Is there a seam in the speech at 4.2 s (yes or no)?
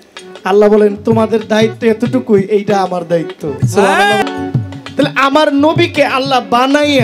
yes